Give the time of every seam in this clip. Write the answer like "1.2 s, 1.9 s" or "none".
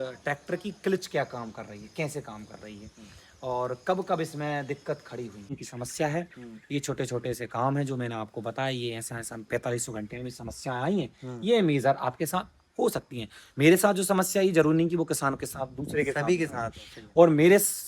5.6 s